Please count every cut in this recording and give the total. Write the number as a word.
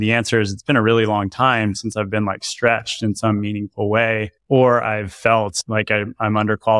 two